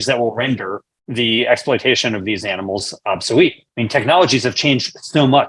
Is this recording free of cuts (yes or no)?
no